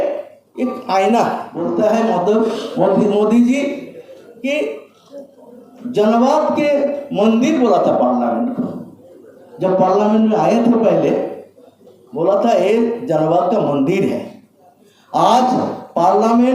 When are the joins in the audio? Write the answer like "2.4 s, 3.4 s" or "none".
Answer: 1.5 s